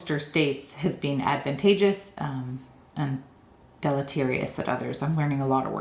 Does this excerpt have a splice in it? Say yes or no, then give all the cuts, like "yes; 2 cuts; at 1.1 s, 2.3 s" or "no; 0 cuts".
no; 0 cuts